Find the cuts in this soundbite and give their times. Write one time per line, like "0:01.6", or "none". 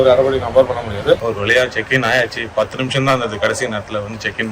0:01.2